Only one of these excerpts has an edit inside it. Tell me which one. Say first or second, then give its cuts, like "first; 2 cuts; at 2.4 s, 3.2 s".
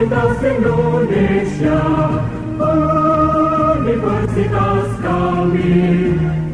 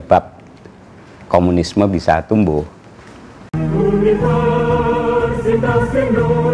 second; 1 cut; at 3.7 s